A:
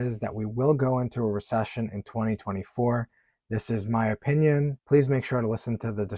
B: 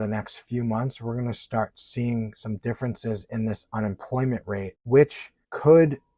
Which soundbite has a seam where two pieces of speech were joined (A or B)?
A